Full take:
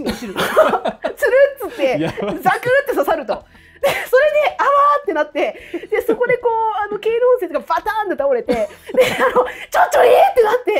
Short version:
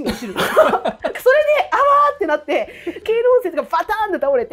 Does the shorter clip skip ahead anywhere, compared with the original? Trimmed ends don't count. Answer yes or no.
yes